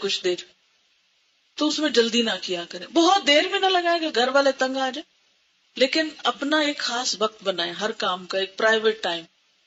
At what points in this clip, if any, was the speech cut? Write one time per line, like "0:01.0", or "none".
none